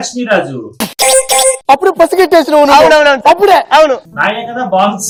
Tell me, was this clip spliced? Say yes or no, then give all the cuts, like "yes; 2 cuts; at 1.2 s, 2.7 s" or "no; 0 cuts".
no; 0 cuts